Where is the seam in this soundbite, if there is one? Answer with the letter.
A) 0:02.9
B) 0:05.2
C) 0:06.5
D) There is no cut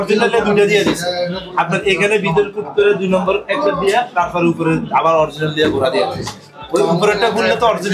D